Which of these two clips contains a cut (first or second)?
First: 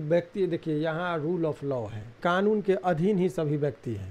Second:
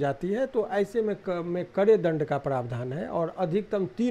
first